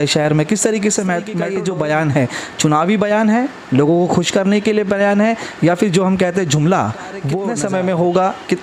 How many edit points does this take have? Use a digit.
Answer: 2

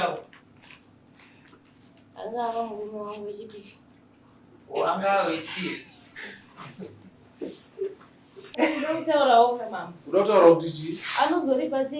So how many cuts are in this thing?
1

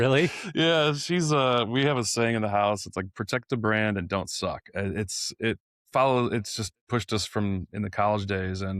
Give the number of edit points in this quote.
1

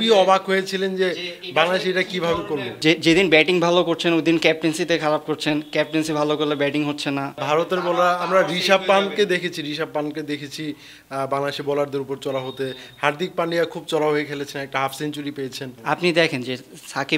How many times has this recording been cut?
3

